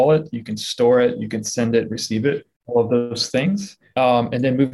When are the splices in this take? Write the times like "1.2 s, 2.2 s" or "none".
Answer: 2.5 s, 3.8 s